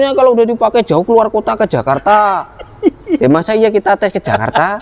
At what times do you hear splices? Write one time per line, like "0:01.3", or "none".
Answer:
none